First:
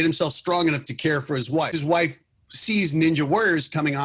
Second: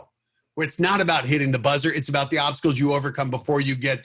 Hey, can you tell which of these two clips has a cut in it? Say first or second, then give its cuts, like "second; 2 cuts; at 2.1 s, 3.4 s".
first; 1 cut; at 1.7 s